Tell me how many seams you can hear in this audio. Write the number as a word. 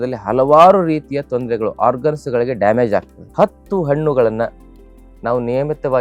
one